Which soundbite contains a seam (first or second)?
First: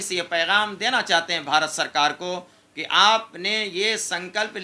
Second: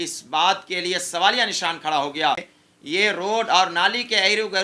second